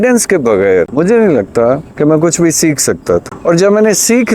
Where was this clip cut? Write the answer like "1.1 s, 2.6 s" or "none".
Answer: 0.9 s, 3.3 s